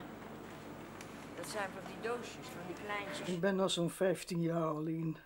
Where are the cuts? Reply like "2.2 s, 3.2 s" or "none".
3.3 s